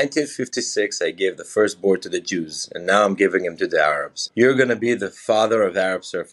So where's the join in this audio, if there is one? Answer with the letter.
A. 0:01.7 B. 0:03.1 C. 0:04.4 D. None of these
D